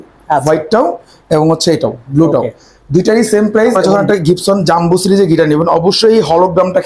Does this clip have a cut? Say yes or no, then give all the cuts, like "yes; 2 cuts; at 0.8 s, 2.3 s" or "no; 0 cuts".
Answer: yes; 1 cut; at 3.8 s